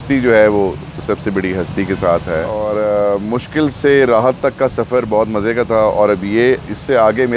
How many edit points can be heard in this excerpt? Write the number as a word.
one